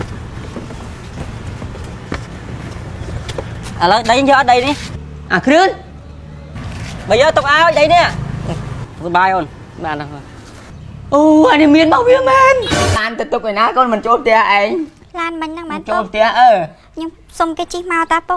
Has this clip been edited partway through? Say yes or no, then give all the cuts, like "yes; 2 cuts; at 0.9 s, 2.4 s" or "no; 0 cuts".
yes; 1 cut; at 13.0 s